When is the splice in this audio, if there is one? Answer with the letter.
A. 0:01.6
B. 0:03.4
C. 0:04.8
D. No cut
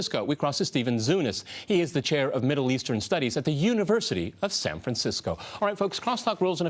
A